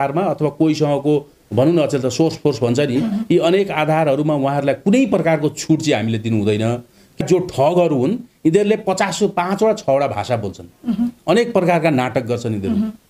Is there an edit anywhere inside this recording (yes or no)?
yes